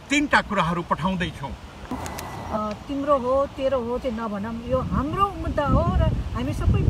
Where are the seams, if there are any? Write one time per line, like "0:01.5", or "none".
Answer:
0:02.0